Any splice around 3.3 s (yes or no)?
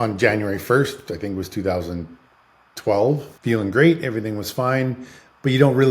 yes